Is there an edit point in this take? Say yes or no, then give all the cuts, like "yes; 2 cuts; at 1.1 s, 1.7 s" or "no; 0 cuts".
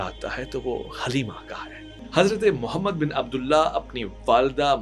yes; 1 cut; at 1.9 s